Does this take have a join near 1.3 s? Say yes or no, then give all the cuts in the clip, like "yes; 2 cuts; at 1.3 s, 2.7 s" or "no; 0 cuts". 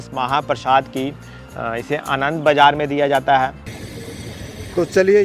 no; 1 cut; at 3.8 s